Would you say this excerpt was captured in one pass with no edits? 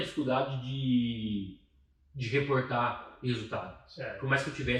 yes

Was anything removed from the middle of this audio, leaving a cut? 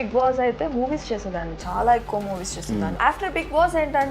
yes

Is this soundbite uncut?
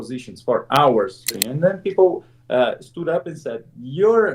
no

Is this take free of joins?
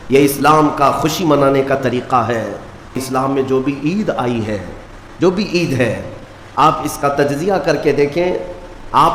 no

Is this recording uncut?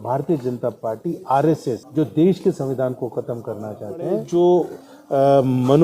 no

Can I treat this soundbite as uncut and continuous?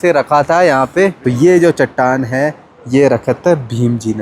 no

